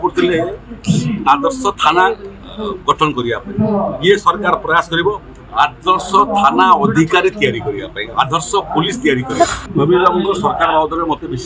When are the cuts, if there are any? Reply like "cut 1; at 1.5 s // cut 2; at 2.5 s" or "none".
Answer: cut 1; at 9.6 s